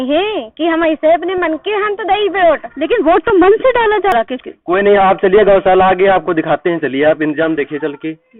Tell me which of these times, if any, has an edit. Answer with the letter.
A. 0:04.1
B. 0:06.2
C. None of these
A